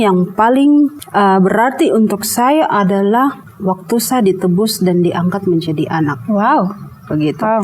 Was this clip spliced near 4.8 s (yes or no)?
no